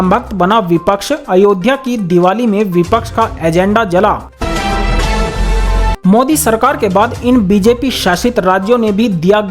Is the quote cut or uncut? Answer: cut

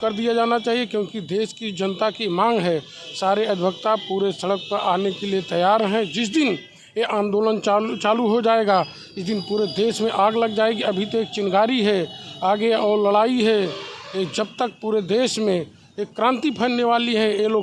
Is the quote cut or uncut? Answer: uncut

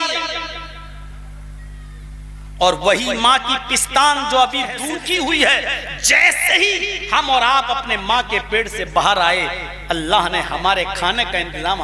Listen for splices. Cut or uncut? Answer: cut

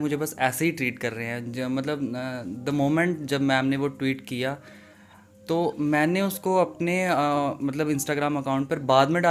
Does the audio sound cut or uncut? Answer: uncut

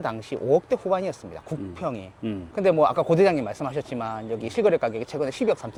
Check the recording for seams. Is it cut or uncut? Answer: uncut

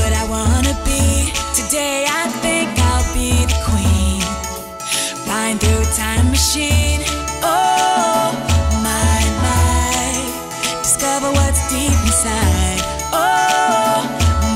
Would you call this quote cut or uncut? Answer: uncut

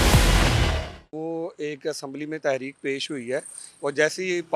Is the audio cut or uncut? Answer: cut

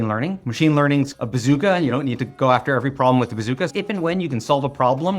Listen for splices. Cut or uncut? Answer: cut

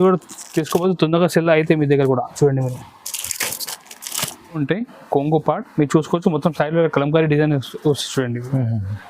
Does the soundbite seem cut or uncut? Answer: cut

